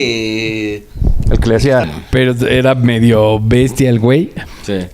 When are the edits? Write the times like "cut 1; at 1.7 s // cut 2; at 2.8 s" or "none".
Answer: cut 1; at 1.9 s